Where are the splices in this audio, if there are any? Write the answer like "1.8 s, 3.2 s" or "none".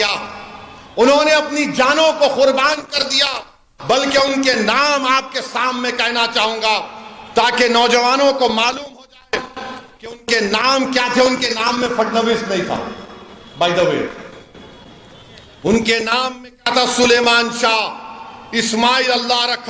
none